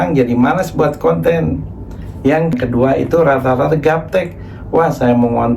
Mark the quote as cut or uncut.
cut